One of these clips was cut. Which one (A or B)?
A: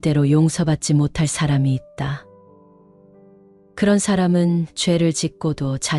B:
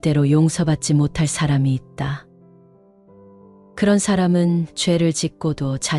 A